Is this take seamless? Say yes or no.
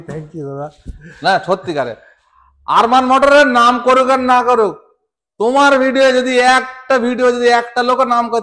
yes